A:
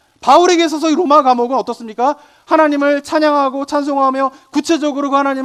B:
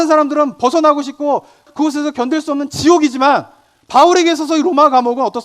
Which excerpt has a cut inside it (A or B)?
B